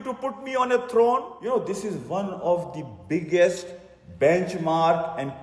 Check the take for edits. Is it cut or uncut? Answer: cut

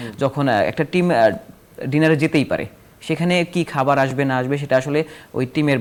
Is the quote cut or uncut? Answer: uncut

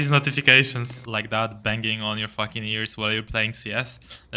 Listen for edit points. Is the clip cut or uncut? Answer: cut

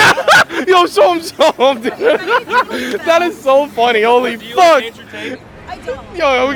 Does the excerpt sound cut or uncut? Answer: uncut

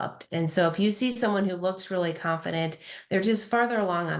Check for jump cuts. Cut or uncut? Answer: uncut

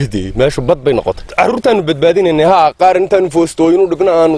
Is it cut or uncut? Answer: cut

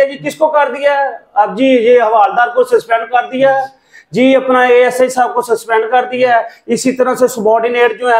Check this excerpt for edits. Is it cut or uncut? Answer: uncut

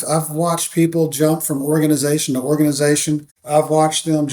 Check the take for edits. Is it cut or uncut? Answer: cut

